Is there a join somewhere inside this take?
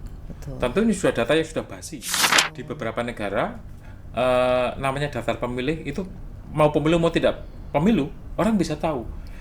yes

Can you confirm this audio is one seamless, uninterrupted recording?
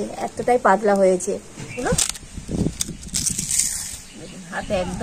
no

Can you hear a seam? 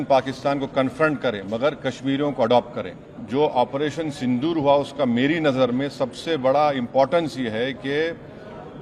yes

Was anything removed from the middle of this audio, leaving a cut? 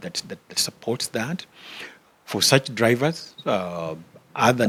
no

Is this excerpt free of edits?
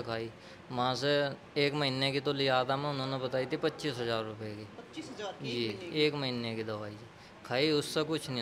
yes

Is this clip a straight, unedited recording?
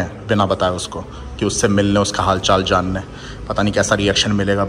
yes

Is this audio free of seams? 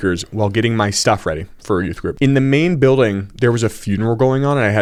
yes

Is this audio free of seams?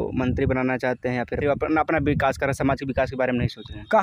no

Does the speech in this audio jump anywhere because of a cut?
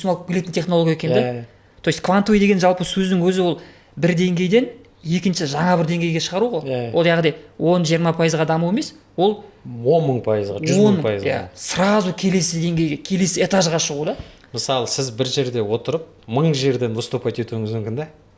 no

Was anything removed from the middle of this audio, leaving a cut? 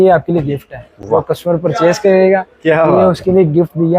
no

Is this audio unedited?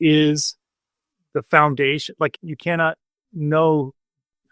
no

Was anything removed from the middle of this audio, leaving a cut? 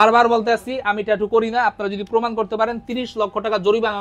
no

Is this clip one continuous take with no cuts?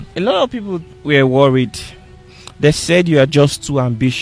no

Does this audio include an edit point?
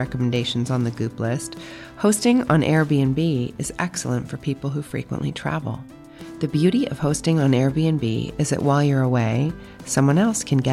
no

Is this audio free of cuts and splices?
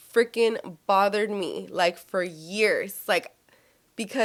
yes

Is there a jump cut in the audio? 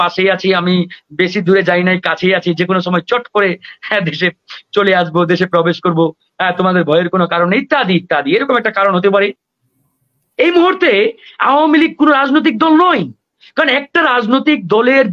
yes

